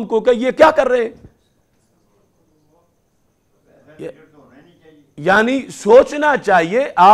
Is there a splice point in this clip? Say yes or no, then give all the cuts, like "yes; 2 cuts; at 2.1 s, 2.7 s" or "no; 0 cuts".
no; 0 cuts